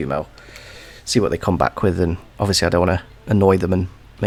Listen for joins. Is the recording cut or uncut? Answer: uncut